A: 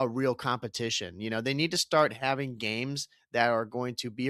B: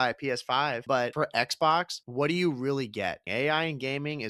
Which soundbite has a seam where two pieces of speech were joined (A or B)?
B